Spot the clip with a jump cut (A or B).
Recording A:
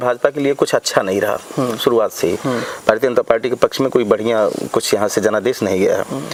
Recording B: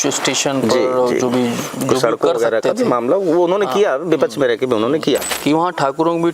B